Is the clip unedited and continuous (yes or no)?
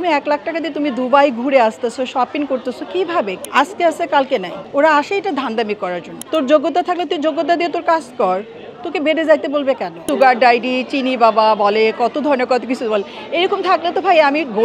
no